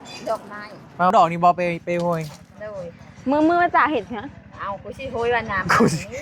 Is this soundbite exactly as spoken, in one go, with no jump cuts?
no; 1 cut; at 1.1 s

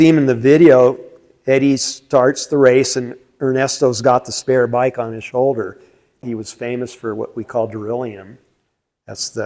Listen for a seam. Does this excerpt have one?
yes; 1 cut; at 6.2 s

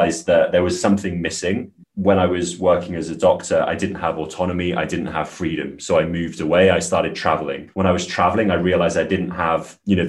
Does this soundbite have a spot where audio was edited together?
yes; 1 cut; at 1.8 s

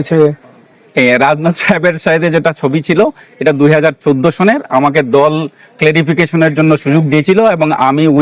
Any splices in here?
no; 0 cuts

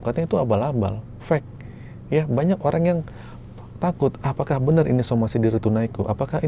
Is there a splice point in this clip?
no; 0 cuts

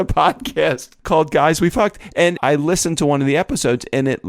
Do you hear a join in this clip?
yes; 2 cuts; at 0.9 s, 2.4 s

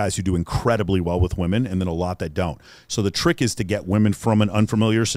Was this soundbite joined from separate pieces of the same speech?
no; 0 cuts

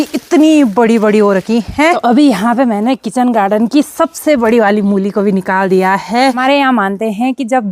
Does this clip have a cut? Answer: yes; 2 cuts; at 2.0 s, 6.4 s

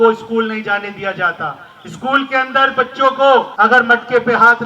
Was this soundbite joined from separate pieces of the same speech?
yes; 1 cut; at 3.5 s

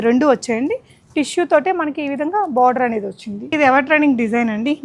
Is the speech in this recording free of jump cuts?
no; 1 cut; at 3.5 s

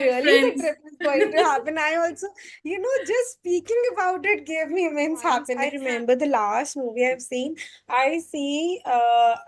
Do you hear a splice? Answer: yes; 1 cut; at 5.6 s

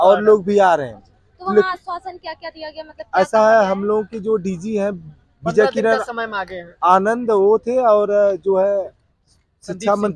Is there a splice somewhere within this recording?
no; 0 cuts

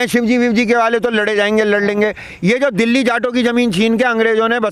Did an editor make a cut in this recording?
no; 0 cuts

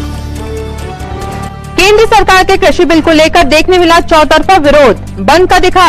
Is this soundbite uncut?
no; 1 cut; at 1.5 s

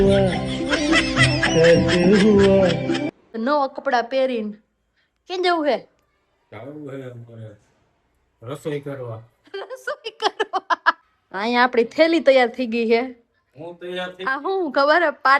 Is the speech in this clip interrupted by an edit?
yes; 2 cuts; at 3.3 s, 11.0 s

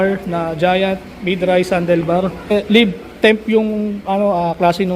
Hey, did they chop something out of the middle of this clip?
yes; 1 cut; at 2.5 s

